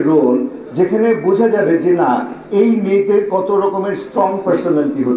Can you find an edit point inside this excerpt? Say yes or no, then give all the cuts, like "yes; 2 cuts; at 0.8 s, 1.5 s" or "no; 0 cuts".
no; 0 cuts